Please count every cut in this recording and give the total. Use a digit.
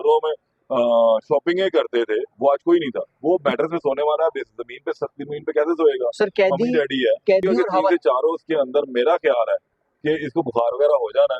2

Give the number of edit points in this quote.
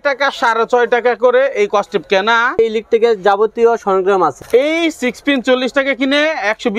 2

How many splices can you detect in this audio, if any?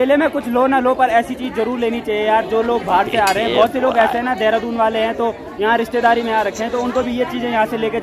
0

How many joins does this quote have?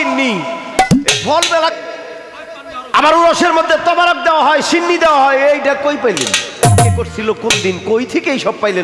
1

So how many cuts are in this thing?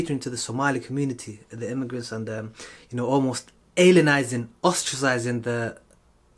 0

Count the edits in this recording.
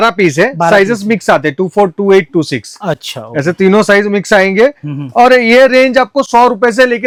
0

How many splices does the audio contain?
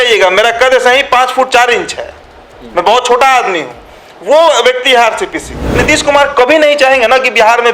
1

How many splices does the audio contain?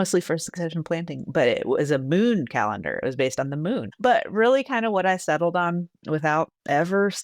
1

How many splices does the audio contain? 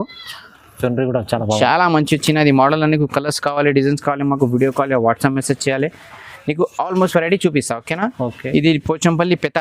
0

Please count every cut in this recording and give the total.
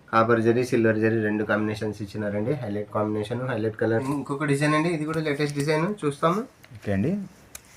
1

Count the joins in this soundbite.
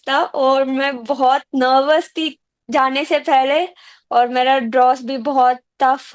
0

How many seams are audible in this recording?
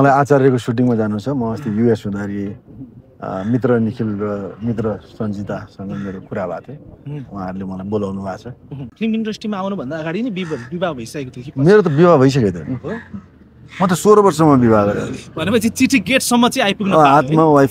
1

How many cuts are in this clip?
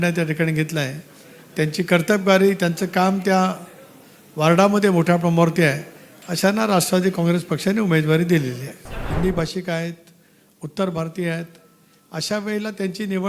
1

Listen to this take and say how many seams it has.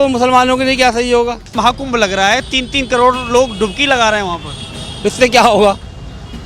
1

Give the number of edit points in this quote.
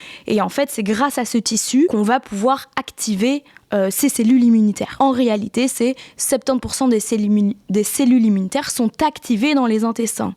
2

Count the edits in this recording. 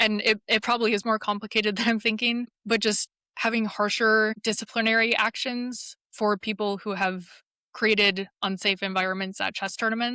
2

